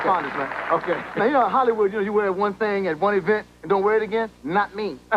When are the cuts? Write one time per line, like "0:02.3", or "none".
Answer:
0:03.5